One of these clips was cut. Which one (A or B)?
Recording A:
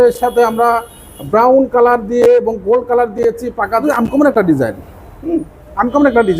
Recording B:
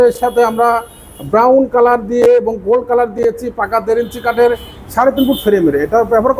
A